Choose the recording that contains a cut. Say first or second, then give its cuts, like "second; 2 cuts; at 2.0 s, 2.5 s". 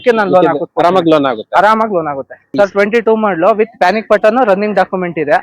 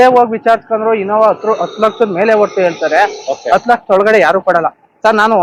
first; 1 cut; at 2.4 s